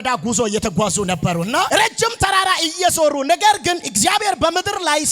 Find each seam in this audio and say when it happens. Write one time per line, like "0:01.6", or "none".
0:01.7